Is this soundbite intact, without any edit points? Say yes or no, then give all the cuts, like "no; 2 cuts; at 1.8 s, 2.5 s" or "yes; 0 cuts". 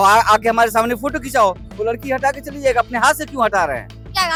yes; 0 cuts